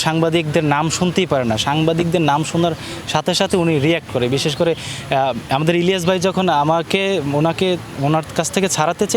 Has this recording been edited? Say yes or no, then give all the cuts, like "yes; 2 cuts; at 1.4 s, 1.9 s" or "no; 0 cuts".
no; 0 cuts